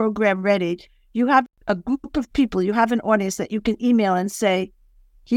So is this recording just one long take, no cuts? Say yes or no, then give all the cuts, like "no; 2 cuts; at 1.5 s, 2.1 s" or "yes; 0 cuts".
no; 1 cut; at 1.4 s